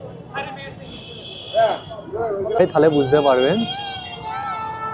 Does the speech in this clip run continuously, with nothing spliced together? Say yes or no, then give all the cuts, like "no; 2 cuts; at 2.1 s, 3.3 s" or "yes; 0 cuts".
no; 1 cut; at 2.5 s